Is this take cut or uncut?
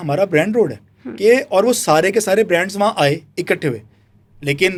uncut